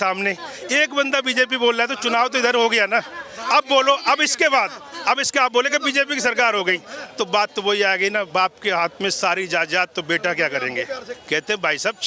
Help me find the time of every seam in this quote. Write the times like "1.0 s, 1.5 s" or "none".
11.1 s